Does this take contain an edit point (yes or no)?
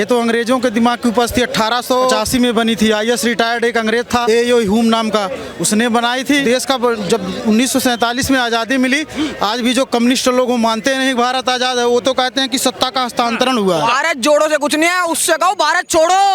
yes